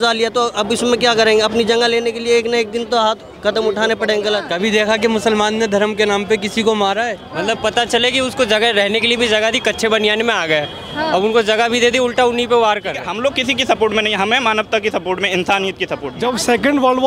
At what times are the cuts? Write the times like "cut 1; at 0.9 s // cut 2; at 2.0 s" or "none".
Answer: cut 1; at 4.5 s // cut 2; at 7.2 s // cut 3; at 13.0 s // cut 4; at 16.1 s